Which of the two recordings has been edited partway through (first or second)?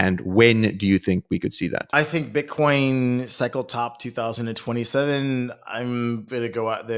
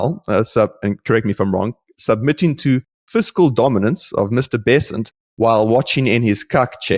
first